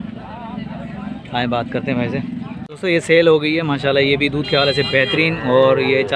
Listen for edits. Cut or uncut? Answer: cut